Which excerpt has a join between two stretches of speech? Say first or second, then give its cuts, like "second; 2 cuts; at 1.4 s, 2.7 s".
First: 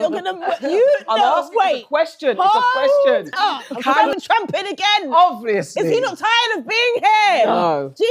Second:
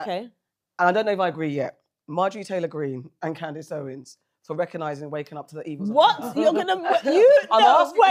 first; 1 cut; at 4.0 s